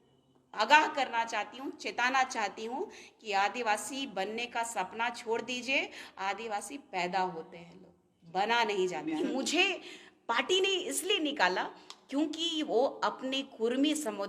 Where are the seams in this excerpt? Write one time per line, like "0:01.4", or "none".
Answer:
0:09.2